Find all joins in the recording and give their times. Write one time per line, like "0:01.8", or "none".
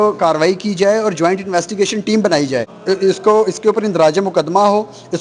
0:02.7

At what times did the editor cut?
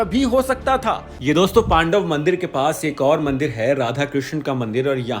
0:01.1

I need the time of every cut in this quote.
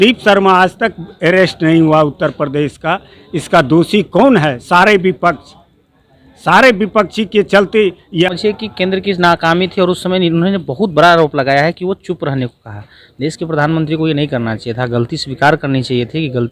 0:08.3

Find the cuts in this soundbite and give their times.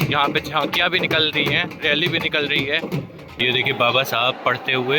0:03.4

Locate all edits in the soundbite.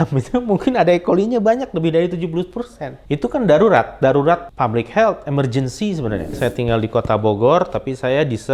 0:02.9
0:04.5
0:06.3

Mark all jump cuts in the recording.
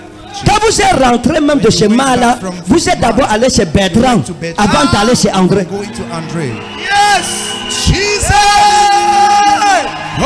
none

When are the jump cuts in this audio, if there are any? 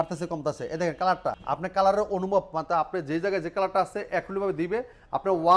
0:01.4

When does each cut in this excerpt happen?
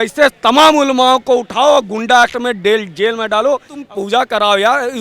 0:03.8

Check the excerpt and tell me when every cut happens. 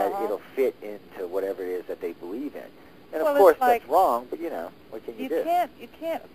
0:04.1

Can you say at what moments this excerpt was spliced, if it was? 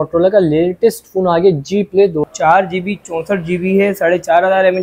0:02.2

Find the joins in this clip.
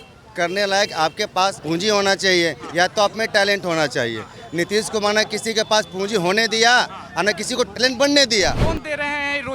0:01.6
0:08.6

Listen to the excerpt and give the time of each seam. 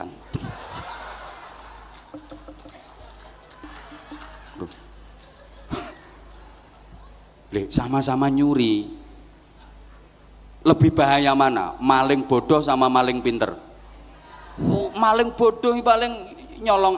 0:03.6

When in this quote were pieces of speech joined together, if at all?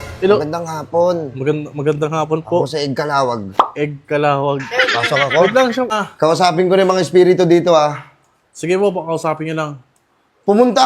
0:06.0

